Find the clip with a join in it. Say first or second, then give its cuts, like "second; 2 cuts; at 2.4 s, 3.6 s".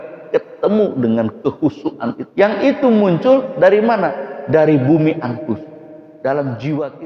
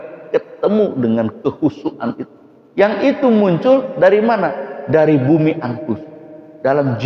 first; 1 cut; at 2.2 s